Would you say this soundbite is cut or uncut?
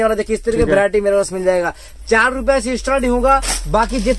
uncut